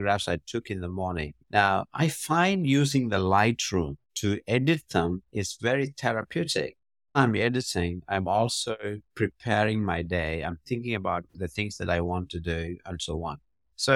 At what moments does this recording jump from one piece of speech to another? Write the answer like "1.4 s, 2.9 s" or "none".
7.2 s